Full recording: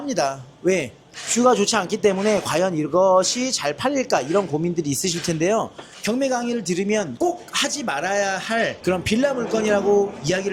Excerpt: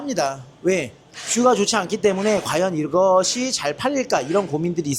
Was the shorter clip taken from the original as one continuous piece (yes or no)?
yes